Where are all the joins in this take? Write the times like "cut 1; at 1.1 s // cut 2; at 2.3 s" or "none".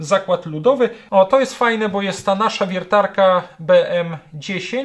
cut 1; at 1.0 s